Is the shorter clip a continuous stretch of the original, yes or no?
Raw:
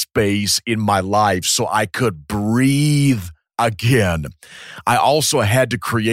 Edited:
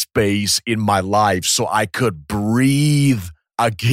yes